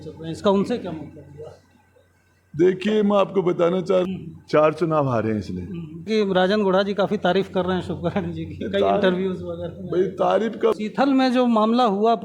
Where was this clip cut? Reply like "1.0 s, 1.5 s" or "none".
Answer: 4.0 s, 6.1 s, 10.8 s